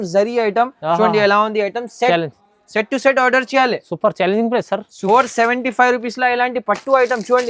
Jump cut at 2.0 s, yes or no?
no